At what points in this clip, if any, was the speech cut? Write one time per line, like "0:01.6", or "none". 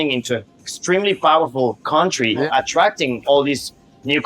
0:02.4